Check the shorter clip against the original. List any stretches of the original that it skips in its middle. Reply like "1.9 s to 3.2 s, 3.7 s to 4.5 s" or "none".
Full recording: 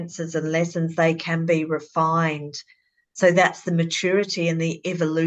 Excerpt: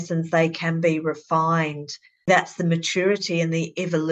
2.9 s to 3.3 s